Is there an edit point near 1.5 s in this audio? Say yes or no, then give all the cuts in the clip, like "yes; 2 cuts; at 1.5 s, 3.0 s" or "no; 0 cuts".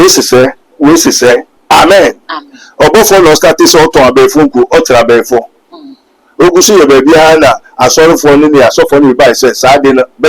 yes; 1 cut; at 1.5 s